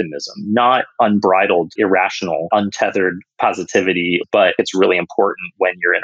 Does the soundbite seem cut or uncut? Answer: cut